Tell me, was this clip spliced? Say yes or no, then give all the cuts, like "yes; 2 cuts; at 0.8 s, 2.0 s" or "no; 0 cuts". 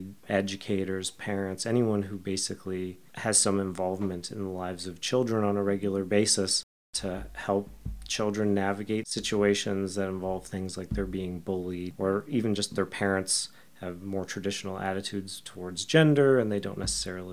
yes; 2 cuts; at 6.9 s, 9.1 s